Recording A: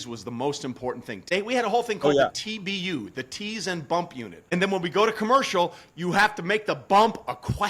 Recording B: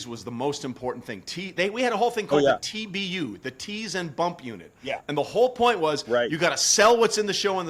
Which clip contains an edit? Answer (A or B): A